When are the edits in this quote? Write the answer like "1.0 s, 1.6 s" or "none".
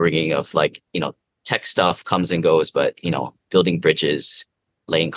none